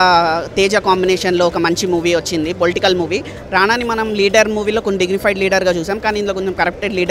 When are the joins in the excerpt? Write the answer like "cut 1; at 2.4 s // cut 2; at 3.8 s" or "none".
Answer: none

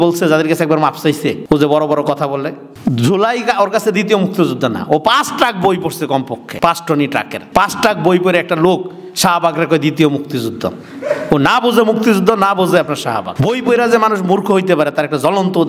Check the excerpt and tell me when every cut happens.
cut 1; at 1.4 s // cut 2; at 2.6 s // cut 3; at 6.4 s // cut 4; at 7.4 s // cut 5; at 13.3 s

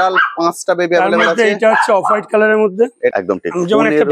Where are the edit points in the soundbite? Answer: cut 1; at 3.1 s

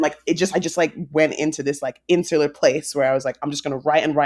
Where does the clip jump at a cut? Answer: none

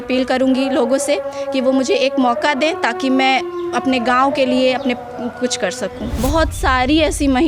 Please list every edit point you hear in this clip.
cut 1; at 6.1 s

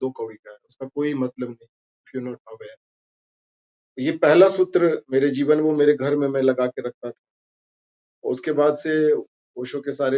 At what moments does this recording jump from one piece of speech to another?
none

